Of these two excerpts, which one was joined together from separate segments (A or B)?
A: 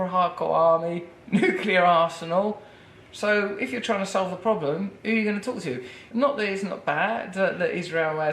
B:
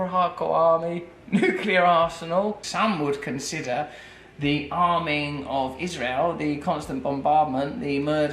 B